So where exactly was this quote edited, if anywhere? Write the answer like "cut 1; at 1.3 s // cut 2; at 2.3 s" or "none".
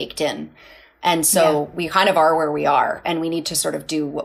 none